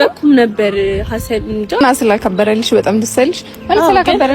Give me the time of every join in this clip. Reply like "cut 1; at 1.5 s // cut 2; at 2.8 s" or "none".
cut 1; at 1.7 s